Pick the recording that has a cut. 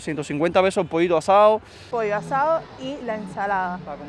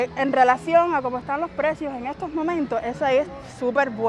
first; 1 cut; at 1.8 s

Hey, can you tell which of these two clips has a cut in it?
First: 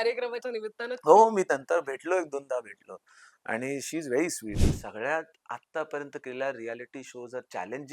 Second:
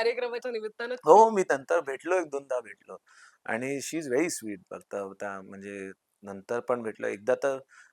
first; 1 cut; at 4.6 s

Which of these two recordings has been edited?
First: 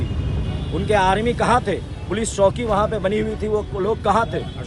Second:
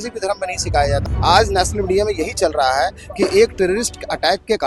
second; 1 cut; at 1.0 s

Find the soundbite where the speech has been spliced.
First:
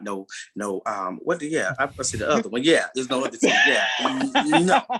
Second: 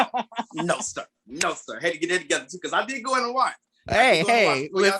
second; 1 cut; at 3.7 s

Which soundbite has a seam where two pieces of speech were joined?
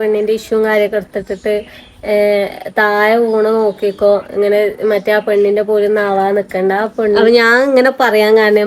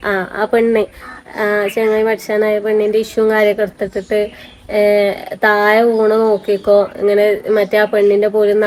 first; 1 cut; at 7.2 s

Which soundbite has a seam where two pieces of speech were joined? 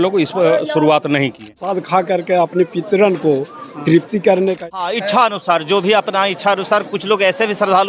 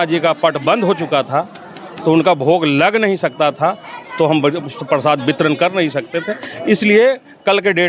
first; 2 cuts; at 1.7 s, 4.6 s

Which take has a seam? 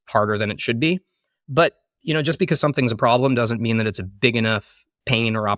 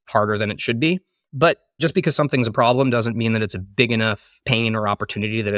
second; 2 cuts; at 1.4 s, 4.3 s

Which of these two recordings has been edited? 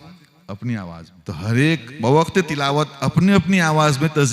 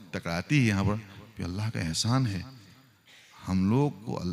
first; 1 cut; at 1.1 s

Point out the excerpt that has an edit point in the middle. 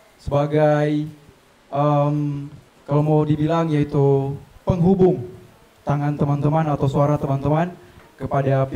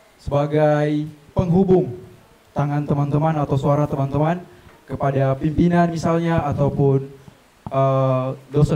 second; 1 cut; at 1.2 s

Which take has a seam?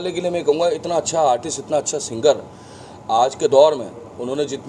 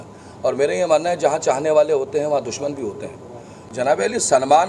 second; 1 cut; at 3.6 s

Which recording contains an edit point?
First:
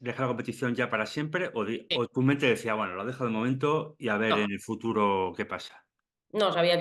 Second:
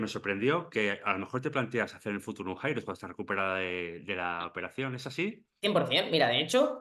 second; 1 cut; at 5.5 s

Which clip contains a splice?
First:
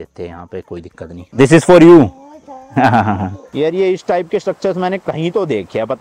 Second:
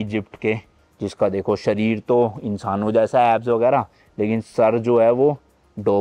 first; 2 cuts; at 1.2 s, 3.5 s

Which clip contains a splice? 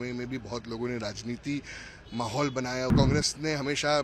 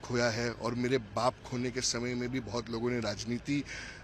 first; 1 cut; at 2.9 s

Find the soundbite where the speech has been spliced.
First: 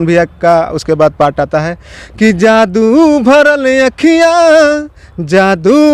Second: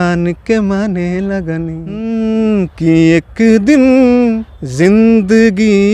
second; 1 cut; at 1.9 s

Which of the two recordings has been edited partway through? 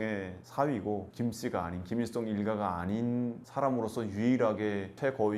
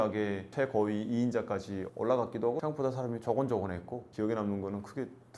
second; 1 cut; at 2.6 s

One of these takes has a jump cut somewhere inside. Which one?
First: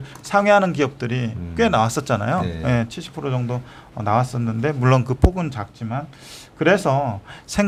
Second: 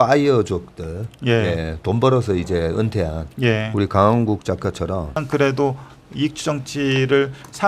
second; 1 cut; at 5.2 s

